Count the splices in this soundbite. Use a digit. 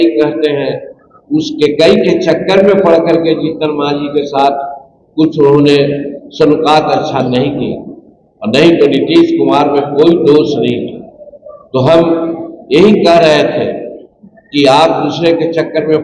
0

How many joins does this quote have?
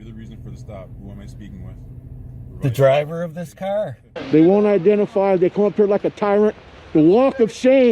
1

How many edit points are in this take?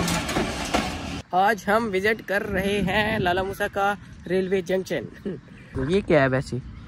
2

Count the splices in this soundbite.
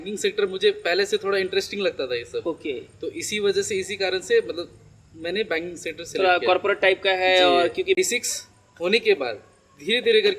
1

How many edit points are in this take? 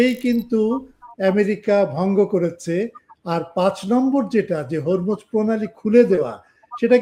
0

